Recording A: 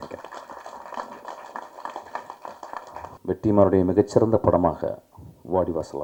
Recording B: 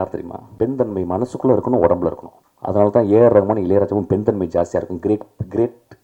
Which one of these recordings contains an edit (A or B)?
A